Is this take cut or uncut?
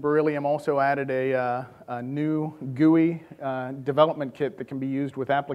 uncut